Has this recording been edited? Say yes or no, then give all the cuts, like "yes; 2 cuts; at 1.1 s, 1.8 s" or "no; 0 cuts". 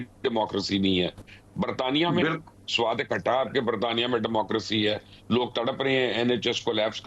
no; 0 cuts